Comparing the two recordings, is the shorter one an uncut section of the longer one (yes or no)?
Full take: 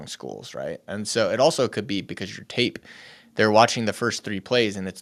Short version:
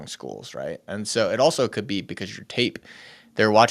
yes